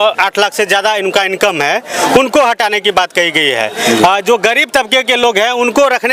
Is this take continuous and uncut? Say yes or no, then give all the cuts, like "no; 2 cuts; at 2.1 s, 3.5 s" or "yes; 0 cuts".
yes; 0 cuts